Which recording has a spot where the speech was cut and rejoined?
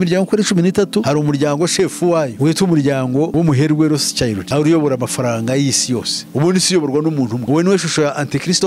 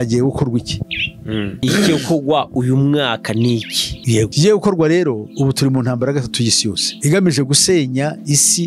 first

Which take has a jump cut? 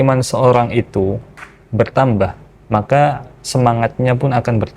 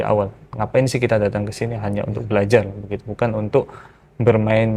first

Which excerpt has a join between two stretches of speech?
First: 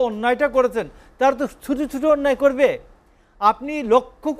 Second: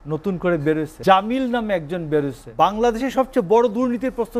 second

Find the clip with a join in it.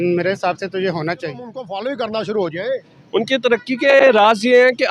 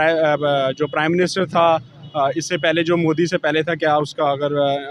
first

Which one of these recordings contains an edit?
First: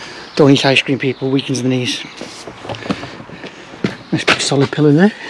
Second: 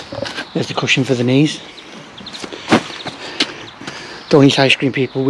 first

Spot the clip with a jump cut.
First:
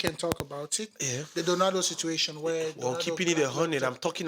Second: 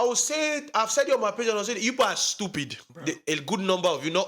second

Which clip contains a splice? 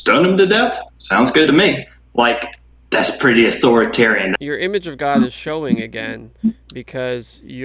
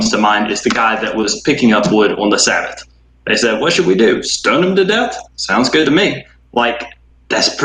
first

